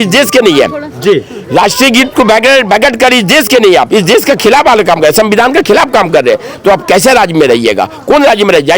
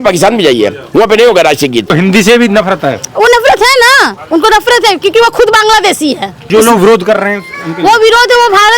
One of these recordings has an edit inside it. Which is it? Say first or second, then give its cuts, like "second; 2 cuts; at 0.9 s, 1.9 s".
second; 2 cuts; at 1.9 s, 6.5 s